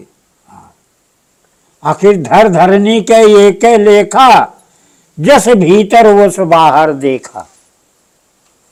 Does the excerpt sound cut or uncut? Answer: uncut